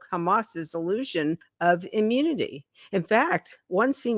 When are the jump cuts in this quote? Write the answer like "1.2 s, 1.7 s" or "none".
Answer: 1.5 s